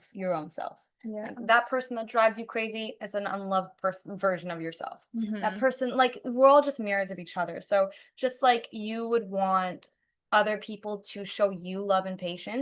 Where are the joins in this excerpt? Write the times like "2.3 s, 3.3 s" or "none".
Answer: none